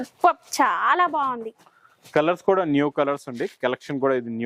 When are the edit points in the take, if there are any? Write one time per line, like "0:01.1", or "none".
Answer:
none

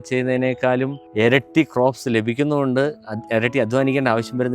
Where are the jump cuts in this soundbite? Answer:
0:01.0

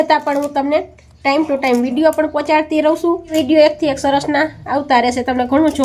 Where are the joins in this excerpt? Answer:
0:03.3

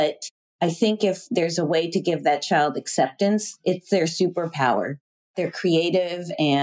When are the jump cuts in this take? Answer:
0:05.3

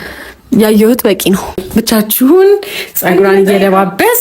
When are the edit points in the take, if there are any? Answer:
0:01.6

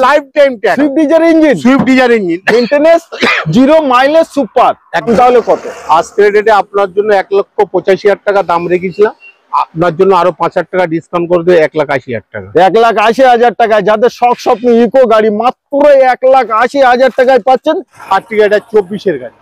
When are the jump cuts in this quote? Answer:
0:05.1
0:17.9

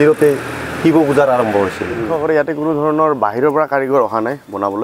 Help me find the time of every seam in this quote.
0:02.0

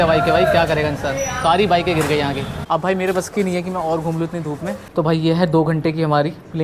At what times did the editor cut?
0:02.5
0:04.8

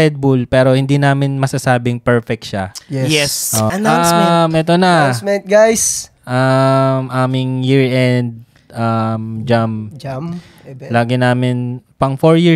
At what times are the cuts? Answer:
0:03.7

